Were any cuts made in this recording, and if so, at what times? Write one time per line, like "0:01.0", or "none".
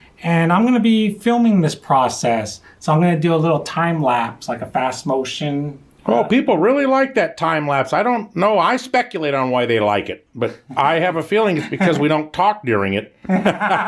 none